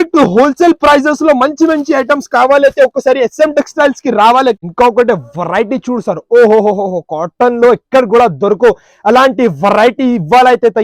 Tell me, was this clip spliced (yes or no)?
yes